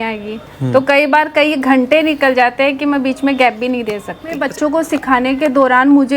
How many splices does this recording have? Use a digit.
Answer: 1